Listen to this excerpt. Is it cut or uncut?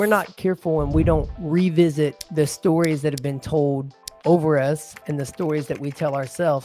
cut